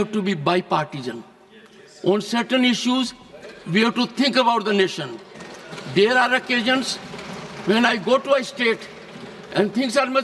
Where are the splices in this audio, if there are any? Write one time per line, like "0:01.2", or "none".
none